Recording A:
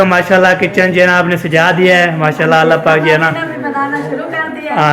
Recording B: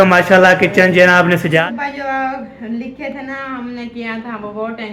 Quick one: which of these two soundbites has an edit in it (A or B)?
B